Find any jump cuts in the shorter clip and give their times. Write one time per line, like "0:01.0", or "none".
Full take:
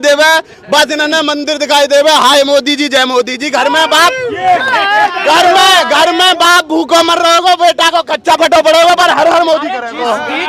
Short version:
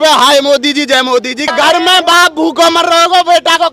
0:01.5